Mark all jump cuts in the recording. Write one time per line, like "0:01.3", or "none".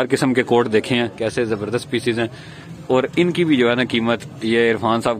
0:01.1

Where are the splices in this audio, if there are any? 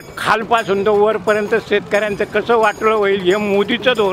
none

